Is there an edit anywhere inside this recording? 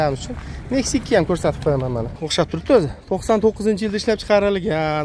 yes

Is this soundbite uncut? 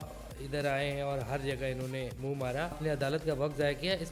no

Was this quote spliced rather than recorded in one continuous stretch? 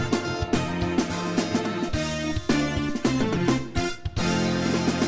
no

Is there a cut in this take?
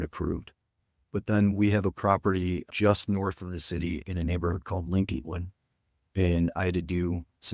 no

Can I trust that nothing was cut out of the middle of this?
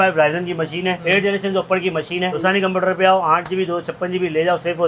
no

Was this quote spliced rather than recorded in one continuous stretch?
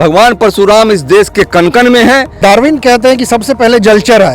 yes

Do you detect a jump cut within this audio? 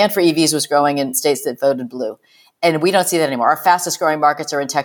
yes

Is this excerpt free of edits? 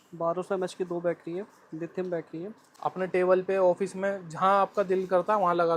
no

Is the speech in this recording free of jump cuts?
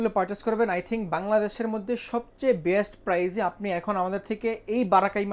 yes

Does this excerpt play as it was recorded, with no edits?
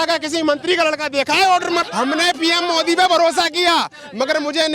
no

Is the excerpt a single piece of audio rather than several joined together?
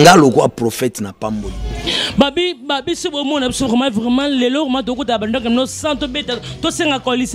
no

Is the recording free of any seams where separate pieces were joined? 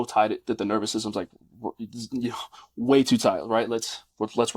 yes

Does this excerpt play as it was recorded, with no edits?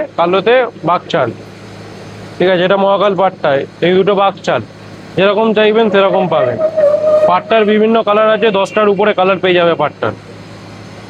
yes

